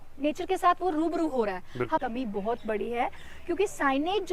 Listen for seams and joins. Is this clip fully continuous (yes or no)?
no